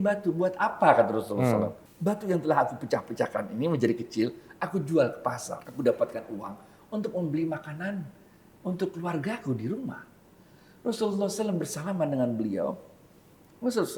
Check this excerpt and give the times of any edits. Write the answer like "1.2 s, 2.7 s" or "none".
1.8 s, 5.6 s

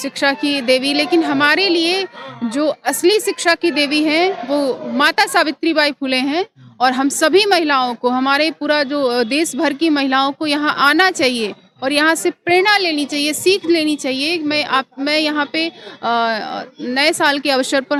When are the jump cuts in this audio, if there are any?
none

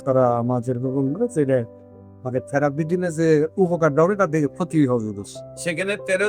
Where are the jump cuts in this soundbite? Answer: none

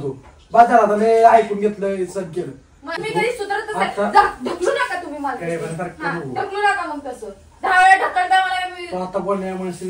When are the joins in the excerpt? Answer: 3.0 s

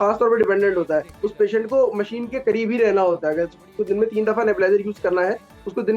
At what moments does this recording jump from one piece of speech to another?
none

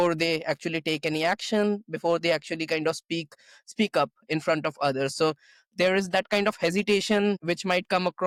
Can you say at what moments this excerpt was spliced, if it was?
none

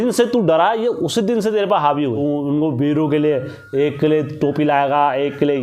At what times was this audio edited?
2.2 s

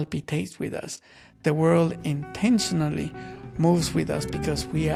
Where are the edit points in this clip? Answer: none

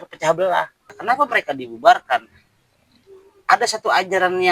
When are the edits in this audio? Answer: 0.9 s

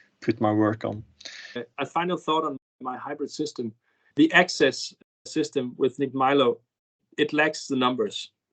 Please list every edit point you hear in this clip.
4.1 s

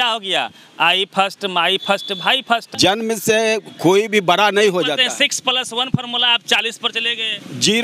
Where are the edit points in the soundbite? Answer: 2.7 s

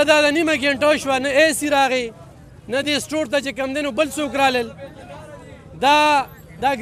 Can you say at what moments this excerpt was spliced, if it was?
none

